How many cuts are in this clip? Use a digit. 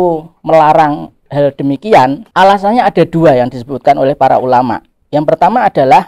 0